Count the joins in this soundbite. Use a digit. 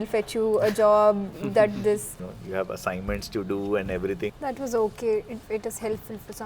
3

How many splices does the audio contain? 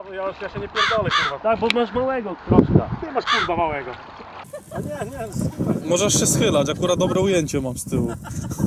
1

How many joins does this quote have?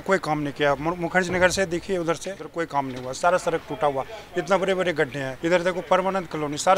2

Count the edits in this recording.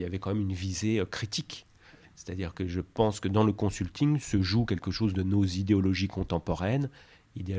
0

